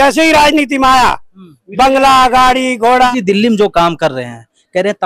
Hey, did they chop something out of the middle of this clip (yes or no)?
yes